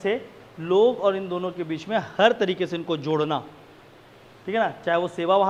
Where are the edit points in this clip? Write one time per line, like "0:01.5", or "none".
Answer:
none